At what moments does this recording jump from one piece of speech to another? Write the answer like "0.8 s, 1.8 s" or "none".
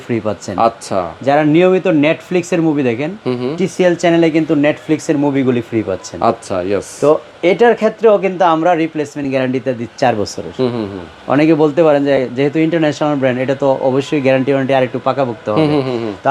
none